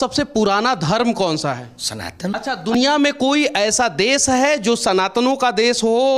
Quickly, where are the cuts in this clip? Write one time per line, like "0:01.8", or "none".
0:02.7